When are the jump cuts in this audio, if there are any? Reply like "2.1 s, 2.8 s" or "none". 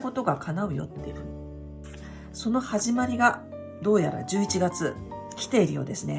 1.0 s, 2.3 s